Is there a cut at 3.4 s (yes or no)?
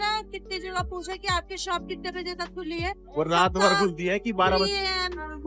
no